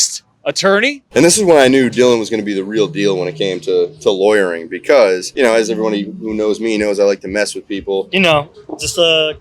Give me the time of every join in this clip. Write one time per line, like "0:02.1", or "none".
0:01.0
0:08.1